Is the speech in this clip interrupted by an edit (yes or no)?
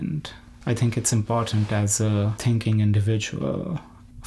yes